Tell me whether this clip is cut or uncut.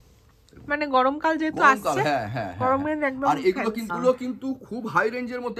cut